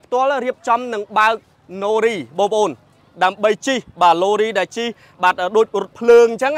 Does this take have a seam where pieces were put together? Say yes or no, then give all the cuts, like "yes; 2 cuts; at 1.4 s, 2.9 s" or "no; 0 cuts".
no; 0 cuts